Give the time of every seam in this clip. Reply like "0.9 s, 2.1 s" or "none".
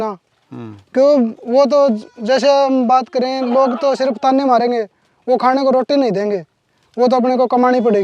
none